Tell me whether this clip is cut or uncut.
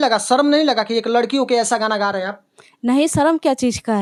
uncut